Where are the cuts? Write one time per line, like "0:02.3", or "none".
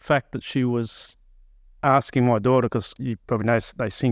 0:02.9